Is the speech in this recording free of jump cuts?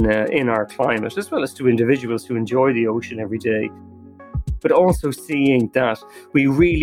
yes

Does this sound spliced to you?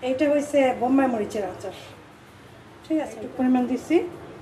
yes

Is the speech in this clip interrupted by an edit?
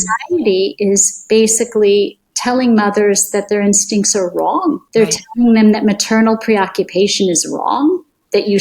yes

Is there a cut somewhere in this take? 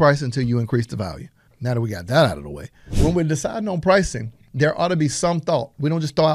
yes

